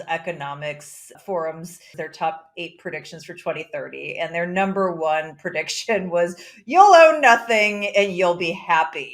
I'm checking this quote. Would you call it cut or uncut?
cut